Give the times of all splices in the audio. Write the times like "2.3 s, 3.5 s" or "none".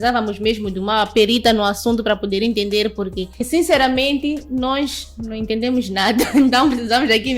none